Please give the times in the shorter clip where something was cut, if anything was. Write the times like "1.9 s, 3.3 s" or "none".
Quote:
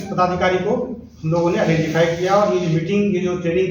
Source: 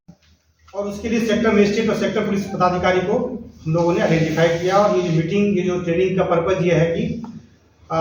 none

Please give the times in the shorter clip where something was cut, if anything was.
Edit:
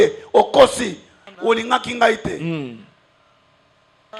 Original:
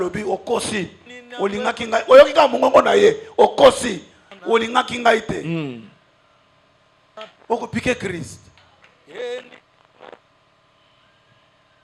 none

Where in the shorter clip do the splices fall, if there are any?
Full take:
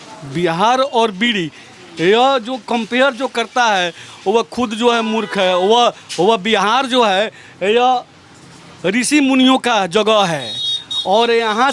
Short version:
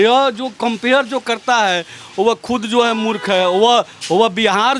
none

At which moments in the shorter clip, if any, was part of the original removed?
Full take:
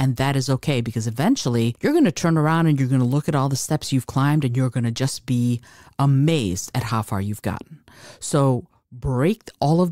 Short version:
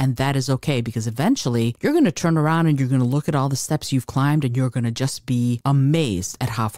5.6 s

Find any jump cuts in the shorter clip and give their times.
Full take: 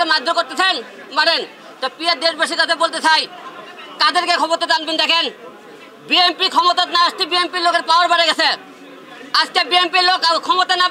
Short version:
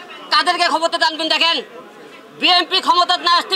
none

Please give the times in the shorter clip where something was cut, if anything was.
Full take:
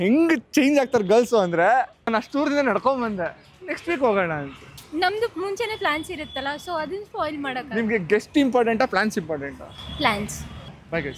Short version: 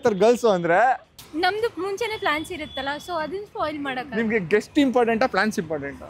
1.1 s

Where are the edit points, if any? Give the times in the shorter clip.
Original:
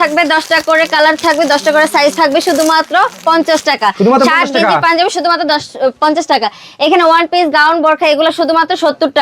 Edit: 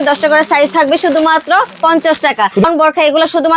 2.6 s

